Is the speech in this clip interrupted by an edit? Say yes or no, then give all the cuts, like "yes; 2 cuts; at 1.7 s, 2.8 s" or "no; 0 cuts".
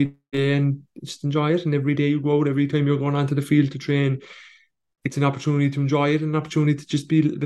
no; 0 cuts